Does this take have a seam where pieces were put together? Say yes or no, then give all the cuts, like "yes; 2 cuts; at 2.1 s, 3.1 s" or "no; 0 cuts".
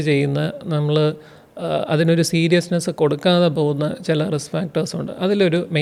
no; 0 cuts